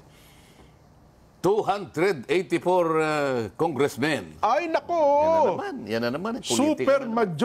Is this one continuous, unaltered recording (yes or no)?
yes